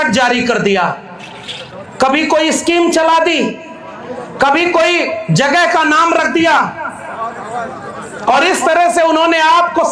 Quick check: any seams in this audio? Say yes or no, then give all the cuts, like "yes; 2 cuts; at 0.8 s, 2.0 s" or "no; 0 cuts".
no; 0 cuts